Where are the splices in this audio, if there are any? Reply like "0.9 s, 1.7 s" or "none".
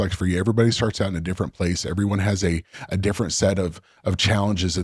none